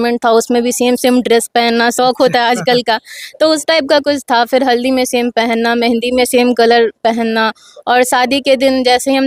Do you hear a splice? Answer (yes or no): no